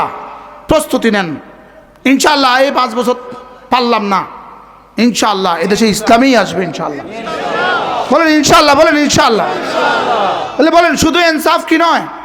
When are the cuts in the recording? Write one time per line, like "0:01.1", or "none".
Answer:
none

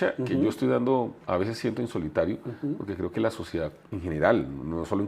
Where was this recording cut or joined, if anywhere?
0:03.8

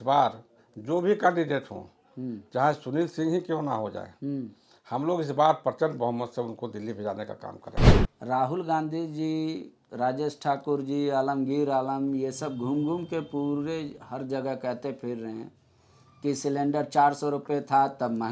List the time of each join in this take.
none

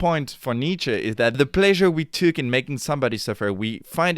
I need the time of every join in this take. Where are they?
0:01.4

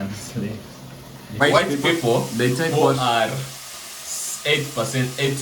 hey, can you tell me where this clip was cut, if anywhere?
0:01.4

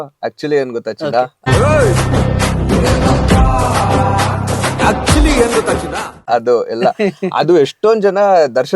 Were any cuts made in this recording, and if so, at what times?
0:01.4
0:06.2

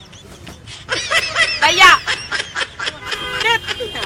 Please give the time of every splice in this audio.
none

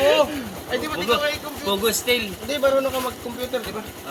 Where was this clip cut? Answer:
none

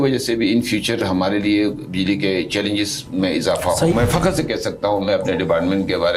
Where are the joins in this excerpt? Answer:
0:03.9

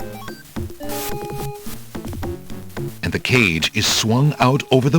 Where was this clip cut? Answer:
0:03.0

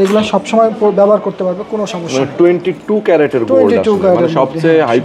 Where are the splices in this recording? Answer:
none

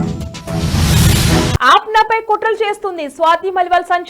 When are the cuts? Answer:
0:01.5

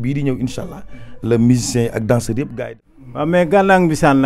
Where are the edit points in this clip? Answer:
0:02.6

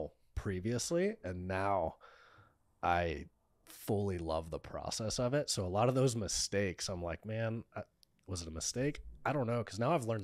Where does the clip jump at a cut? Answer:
none

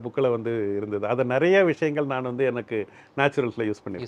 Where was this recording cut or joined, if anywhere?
none

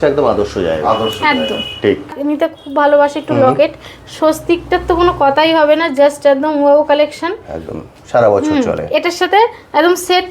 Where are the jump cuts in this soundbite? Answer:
0:02.2

